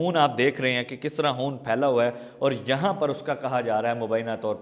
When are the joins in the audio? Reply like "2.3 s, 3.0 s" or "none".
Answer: none